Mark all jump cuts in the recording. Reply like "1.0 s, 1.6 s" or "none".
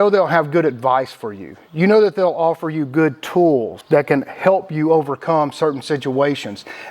3.7 s